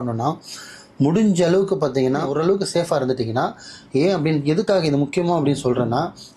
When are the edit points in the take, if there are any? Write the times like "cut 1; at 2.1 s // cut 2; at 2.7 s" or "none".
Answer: cut 1; at 2.3 s